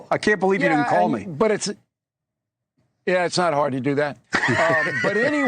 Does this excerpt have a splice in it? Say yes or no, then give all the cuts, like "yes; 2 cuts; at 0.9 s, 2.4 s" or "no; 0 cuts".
no; 0 cuts